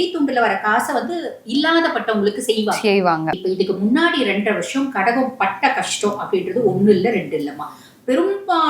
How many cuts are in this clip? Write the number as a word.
one